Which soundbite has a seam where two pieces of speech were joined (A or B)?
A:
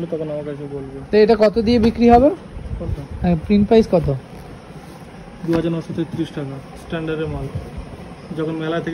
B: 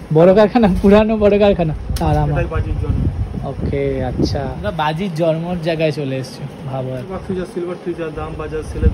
B